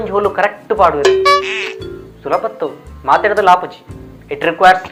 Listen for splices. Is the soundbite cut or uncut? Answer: uncut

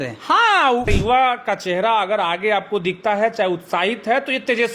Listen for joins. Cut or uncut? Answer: cut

